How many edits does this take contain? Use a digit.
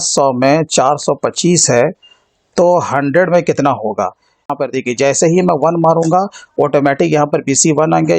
1